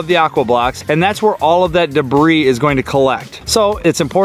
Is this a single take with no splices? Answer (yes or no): no